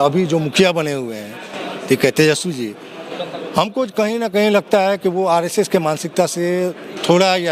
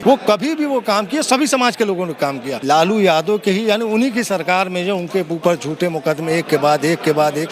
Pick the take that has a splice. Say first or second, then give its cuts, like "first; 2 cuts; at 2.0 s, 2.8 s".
second; 1 cut; at 2.6 s